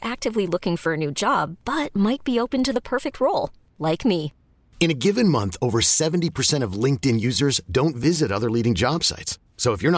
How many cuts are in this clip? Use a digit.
0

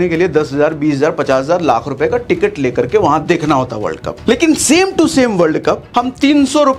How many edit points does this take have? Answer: 2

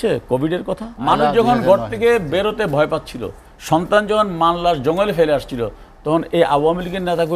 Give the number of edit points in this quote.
1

